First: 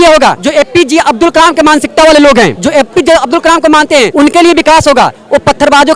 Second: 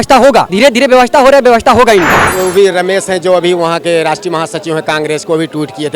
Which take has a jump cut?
second; 1 cut; at 2.2 s

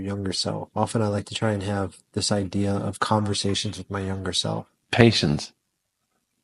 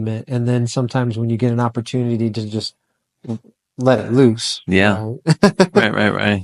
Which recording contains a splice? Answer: first; 1 cut; at 4.7 s

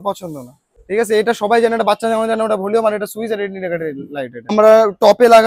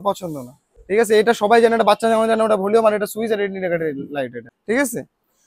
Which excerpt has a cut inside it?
first; 1 cut; at 4.4 s

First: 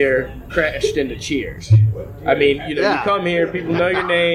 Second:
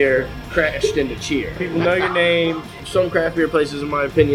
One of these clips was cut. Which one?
second; 2 cuts; at 1.6 s, 2.8 s

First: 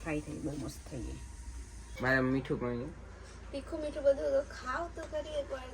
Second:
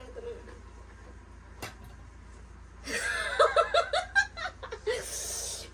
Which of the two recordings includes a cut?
first; 1 cut; at 1.9 s

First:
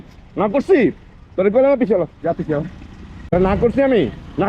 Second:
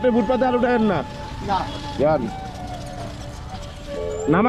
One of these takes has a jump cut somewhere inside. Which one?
first; 1 cut; at 3.3 s

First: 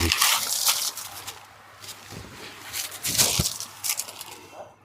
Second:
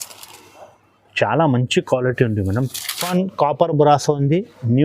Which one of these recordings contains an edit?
second; 1 cut; at 3.1 s

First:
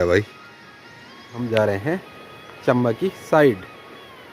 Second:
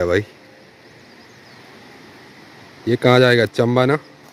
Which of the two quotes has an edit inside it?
first; 1 cut; at 1.3 s

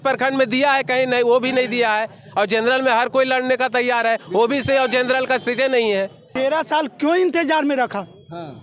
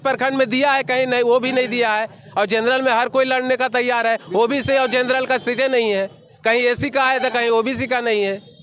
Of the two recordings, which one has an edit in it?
first; 1 cut; at 6.2 s

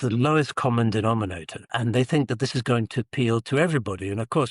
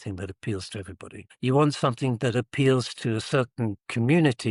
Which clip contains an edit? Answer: first; 1 cut; at 1.7 s

